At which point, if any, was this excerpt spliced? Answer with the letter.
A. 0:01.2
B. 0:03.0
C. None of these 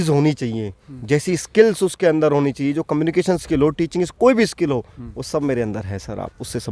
C